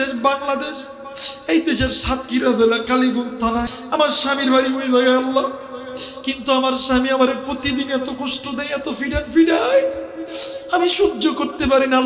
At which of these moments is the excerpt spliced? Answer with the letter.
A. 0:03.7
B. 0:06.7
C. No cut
A